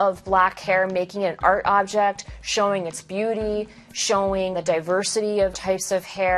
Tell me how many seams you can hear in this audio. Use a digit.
2